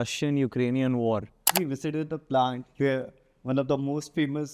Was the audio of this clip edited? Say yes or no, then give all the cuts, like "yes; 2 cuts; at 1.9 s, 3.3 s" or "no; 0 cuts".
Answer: yes; 1 cut; at 1.5 s